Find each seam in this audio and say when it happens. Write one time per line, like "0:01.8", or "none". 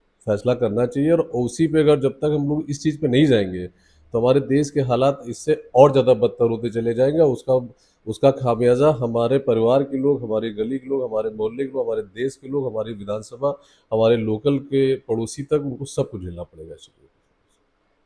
none